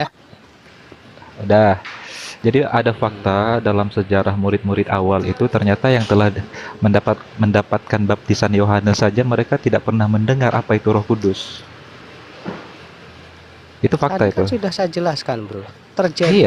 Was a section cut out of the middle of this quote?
no; 0 cuts

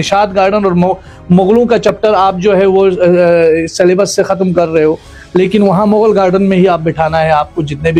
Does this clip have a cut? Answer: no; 0 cuts

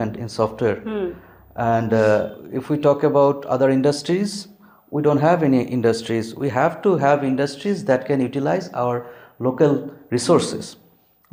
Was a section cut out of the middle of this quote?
no; 0 cuts

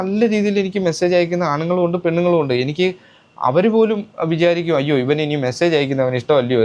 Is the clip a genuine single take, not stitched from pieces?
yes; 0 cuts

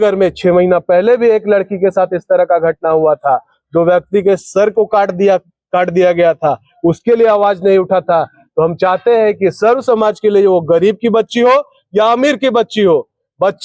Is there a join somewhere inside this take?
no; 0 cuts

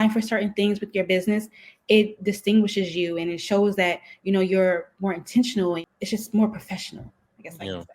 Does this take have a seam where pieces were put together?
yes; 1 cut; at 5.9 s

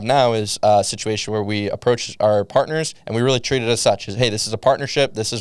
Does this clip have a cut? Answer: no; 0 cuts

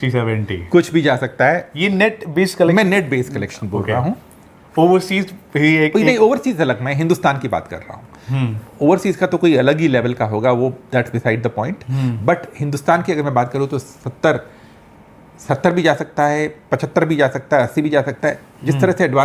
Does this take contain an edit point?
no; 0 cuts

